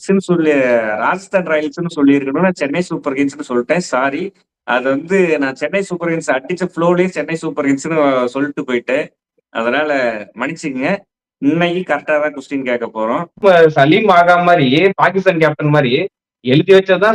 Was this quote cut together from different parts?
yes; 1 cut; at 13.3 s

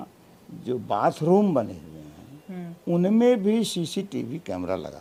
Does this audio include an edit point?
no; 0 cuts

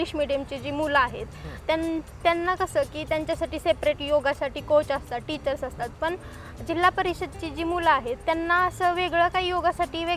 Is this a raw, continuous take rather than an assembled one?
yes; 0 cuts

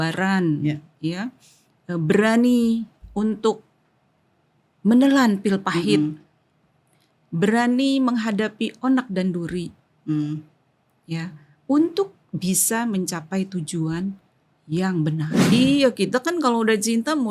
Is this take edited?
yes; 1 cut; at 15.4 s

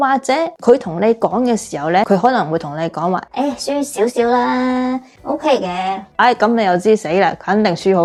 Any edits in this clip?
no; 0 cuts

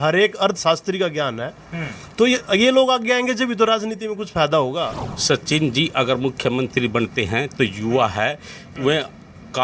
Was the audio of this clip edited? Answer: yes; 1 cut; at 5.1 s

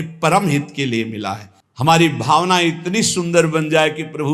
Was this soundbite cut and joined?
yes; 1 cut; at 1.5 s

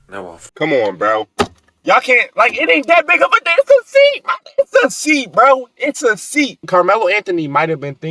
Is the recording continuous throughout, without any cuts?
no; 1 cut; at 6.6 s

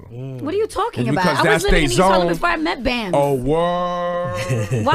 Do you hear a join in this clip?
yes; 1 cut; at 3.6 s

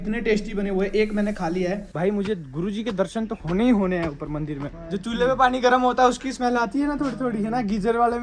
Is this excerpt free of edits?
no; 2 cuts; at 1.9 s, 4.7 s

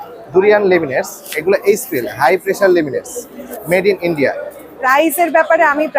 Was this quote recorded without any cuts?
no; 2 cuts; at 3.6 s, 4.8 s

